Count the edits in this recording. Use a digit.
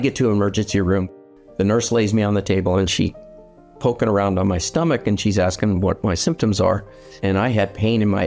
2